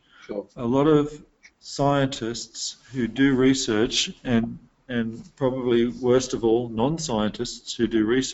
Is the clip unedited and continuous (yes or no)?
yes